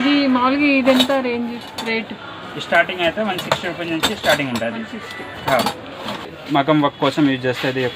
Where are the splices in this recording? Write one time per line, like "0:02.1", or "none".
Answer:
0:06.3